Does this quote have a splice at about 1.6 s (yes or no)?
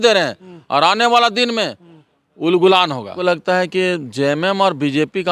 no